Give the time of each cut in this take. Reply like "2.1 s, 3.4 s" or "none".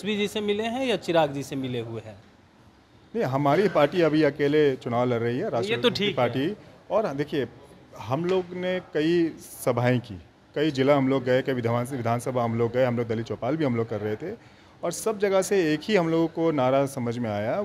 none